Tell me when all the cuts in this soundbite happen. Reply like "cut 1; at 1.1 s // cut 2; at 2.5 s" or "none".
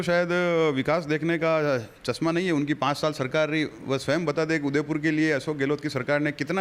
none

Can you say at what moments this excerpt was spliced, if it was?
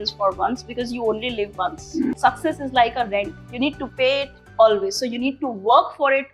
cut 1; at 2.2 s // cut 2; at 3.4 s // cut 3; at 4.4 s

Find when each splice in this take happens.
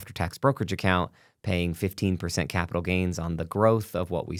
none

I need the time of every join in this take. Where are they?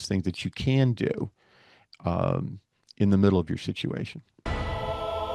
cut 1; at 4.3 s

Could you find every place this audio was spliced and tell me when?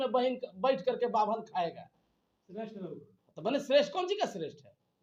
none

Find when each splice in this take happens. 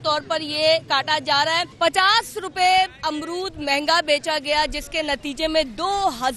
cut 1; at 1.7 s

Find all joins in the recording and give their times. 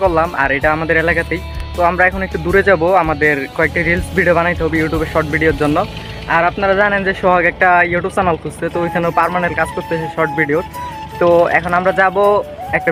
none

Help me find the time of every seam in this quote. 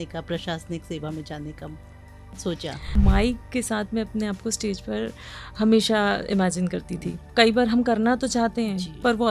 cut 1; at 2.9 s // cut 2; at 7.2 s

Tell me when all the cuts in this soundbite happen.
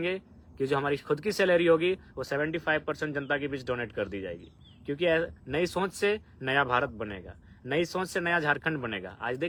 none

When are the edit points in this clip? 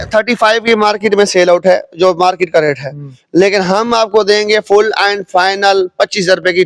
none

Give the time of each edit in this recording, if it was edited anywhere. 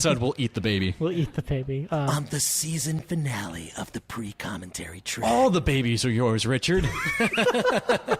cut 1; at 2.1 s // cut 2; at 5.2 s

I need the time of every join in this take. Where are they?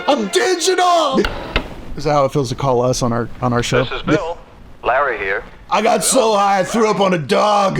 cut 1; at 1.3 s

